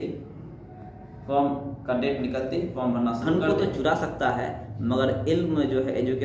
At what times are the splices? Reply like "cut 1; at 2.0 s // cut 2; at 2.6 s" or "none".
cut 1; at 3.2 s